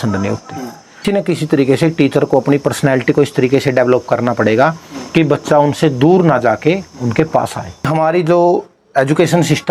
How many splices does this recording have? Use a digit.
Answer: 2